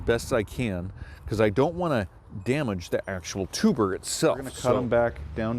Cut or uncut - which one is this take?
cut